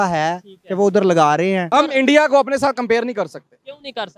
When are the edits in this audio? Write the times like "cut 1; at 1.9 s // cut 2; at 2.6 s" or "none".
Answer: cut 1; at 1.7 s